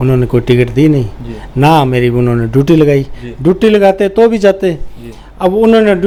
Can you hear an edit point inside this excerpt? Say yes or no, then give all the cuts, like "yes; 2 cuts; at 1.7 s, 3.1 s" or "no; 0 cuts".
no; 0 cuts